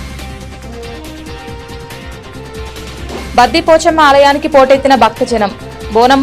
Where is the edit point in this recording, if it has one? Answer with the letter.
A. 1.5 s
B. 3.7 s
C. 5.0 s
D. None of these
A